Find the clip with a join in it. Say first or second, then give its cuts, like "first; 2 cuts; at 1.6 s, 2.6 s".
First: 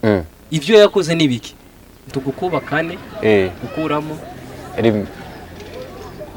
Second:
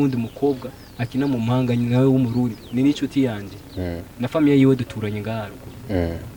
first; 1 cut; at 2.1 s